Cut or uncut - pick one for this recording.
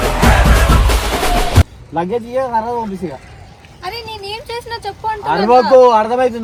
uncut